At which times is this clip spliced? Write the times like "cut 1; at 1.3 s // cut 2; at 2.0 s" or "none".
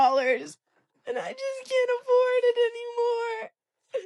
none